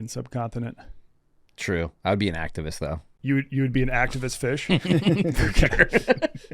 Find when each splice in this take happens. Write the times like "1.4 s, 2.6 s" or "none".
3.1 s